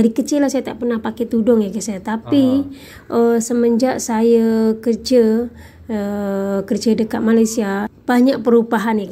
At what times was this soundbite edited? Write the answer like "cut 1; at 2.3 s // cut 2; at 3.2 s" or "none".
cut 1; at 7.9 s